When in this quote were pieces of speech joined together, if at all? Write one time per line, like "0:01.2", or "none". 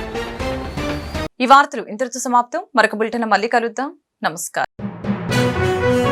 none